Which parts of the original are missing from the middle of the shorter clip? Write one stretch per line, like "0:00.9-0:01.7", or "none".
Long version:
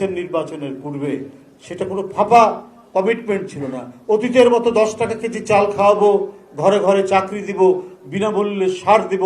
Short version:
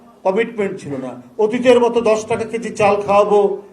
none